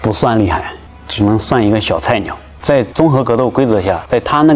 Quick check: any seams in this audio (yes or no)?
no